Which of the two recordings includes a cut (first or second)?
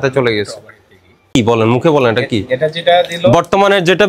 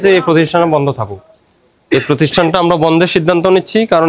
first